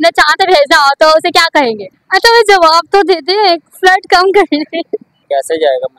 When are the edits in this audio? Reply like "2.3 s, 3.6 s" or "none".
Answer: 1.9 s, 5.1 s